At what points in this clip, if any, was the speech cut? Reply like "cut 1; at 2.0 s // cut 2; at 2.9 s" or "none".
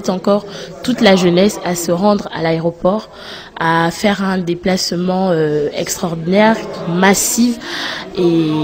none